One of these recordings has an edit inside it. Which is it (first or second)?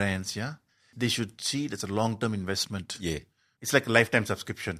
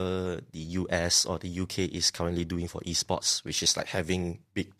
first